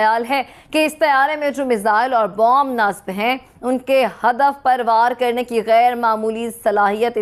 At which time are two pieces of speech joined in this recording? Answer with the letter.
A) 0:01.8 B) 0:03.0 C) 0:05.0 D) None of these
D